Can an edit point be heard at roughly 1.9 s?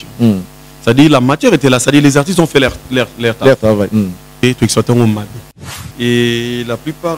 no; 2 cuts; at 4.3 s, 5.6 s

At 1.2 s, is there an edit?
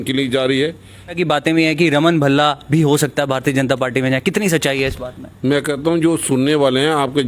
yes; 1 cut; at 1.2 s

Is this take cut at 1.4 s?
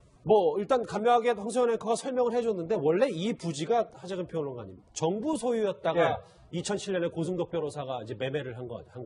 yes; 1 cut; at 1.4 s

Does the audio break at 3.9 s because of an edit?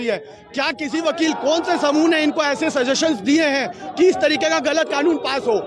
no; 0 cuts

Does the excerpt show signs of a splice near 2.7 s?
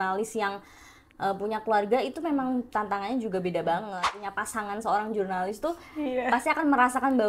no; 1 cut; at 4.2 s

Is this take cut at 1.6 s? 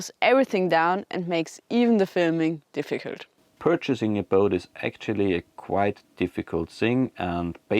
no; 1 cut; at 3.5 s

